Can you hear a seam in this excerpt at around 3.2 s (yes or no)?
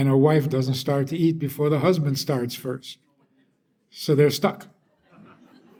no